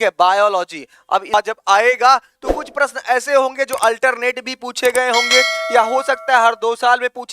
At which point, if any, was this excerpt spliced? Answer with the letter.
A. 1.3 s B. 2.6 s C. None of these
A